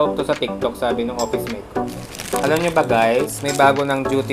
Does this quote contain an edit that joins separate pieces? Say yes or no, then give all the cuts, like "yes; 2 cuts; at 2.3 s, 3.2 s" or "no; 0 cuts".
yes; 1 cut; at 1.8 s